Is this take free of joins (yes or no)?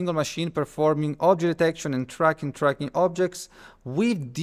yes